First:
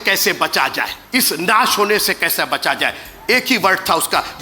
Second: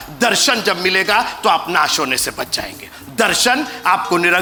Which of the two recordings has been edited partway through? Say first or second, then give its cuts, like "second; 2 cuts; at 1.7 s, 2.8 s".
first; 1 cut; at 1.0 s